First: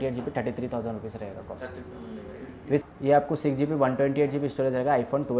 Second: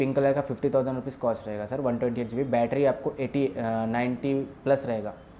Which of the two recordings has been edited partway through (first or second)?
first